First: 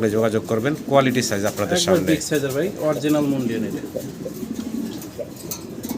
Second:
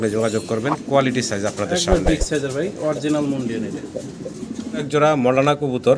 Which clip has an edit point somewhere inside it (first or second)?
second